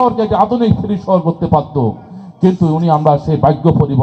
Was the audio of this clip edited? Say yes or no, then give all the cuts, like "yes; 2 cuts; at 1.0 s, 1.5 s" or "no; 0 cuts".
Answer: no; 0 cuts